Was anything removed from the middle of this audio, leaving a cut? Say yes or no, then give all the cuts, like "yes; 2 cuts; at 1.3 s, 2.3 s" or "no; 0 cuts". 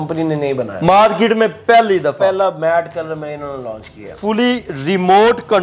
yes; 1 cut; at 4.2 s